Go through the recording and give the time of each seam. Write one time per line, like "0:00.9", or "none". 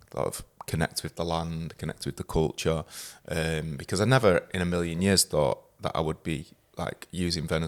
none